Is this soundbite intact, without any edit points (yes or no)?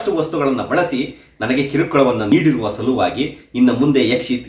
no